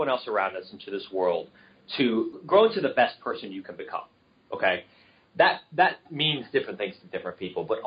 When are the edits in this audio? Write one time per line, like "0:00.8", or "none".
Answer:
0:02.4